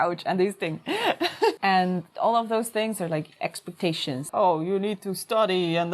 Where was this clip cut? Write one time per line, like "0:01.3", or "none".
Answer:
0:01.6
0:04.2